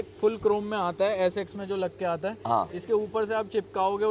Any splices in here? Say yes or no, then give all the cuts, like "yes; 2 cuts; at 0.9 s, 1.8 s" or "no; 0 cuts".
no; 0 cuts